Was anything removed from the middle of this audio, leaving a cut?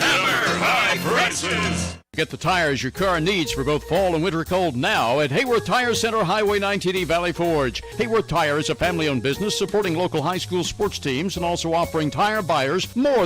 yes; 1 cut; at 2.0 s

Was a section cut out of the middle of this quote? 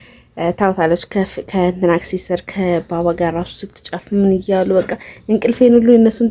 no; 0 cuts

